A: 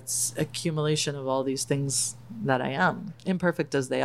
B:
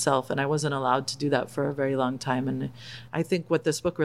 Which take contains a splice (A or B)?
A